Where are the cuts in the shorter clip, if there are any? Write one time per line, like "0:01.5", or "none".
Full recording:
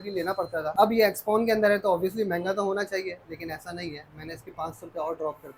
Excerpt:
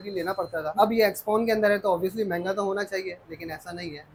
none